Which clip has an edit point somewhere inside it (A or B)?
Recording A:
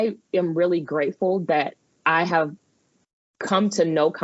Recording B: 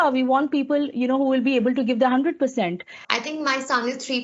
B